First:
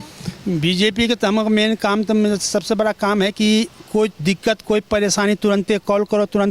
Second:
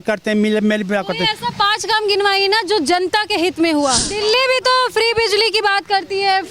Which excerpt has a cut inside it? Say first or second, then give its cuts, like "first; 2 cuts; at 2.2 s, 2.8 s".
second; 1 cut; at 4.2 s